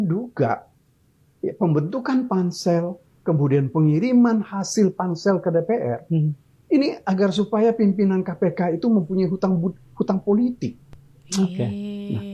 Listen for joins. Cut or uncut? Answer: uncut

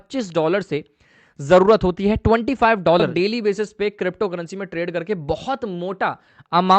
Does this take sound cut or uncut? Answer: cut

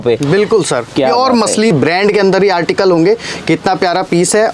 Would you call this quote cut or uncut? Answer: cut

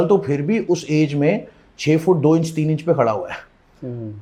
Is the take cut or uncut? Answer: uncut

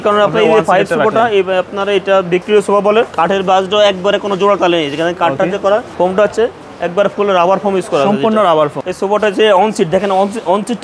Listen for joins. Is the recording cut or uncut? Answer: cut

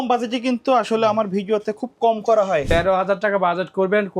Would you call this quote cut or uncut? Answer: cut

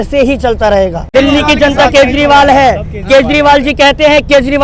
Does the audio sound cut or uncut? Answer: cut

